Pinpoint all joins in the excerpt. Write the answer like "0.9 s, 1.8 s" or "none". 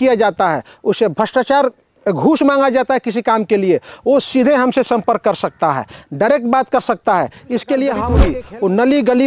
8.3 s